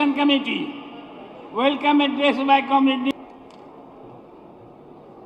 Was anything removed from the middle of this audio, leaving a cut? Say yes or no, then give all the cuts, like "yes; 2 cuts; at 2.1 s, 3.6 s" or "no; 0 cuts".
yes; 1 cut; at 3.1 s